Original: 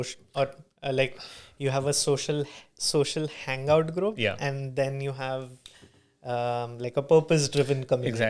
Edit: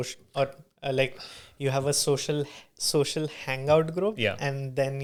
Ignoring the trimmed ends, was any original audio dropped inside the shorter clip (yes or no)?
no